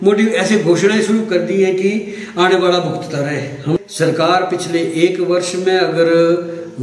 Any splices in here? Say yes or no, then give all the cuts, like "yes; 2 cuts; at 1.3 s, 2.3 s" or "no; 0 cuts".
no; 0 cuts